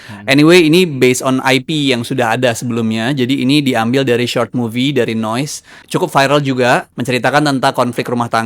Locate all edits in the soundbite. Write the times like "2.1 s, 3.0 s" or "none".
5.8 s, 6.9 s